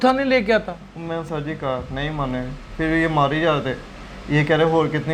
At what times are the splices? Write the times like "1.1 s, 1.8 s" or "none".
none